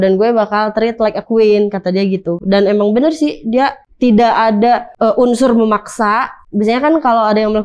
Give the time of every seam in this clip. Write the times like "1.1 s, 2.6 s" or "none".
3.8 s, 4.9 s, 6.4 s